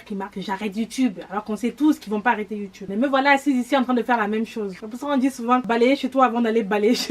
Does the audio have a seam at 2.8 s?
yes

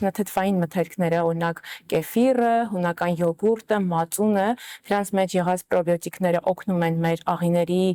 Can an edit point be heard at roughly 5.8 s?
no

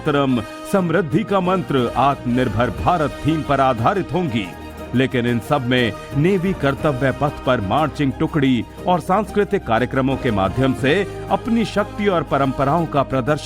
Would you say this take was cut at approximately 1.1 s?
yes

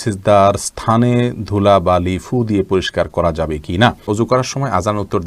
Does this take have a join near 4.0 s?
yes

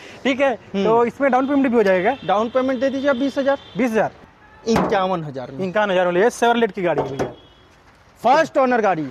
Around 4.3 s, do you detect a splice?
yes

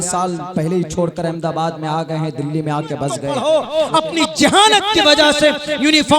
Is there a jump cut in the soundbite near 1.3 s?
no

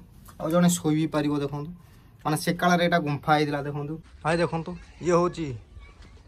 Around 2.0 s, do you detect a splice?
no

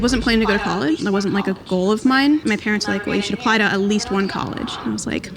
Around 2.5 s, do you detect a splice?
no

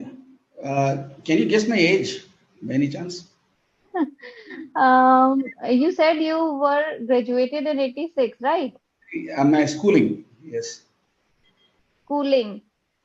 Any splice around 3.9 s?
yes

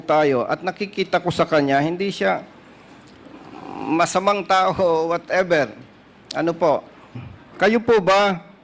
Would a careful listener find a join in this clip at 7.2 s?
yes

